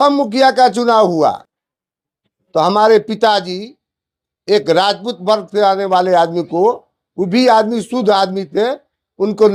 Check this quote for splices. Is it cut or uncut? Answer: uncut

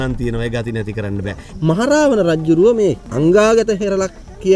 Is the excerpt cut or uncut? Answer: cut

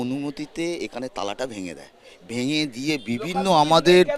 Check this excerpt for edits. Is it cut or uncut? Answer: uncut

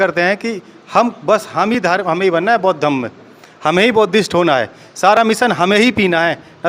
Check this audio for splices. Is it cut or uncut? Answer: uncut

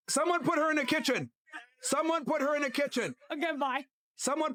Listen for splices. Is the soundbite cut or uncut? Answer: uncut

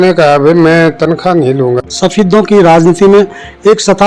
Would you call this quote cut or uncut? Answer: cut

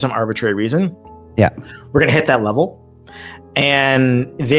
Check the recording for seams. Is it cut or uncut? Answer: uncut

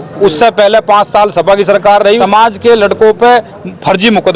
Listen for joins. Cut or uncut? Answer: cut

